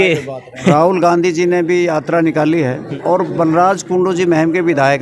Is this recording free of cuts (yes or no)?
no